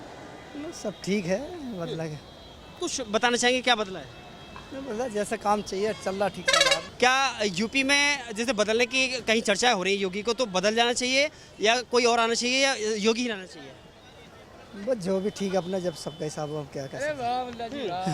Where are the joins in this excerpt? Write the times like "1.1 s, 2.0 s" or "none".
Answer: none